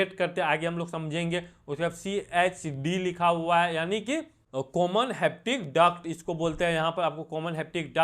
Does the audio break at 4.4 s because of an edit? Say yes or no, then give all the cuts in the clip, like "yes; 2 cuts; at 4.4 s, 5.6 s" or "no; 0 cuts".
yes; 1 cut; at 4.4 s